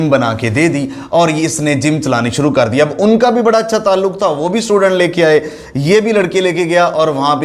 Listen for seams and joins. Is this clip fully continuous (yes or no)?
yes